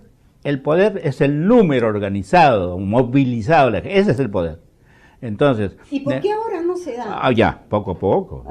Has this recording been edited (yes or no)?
no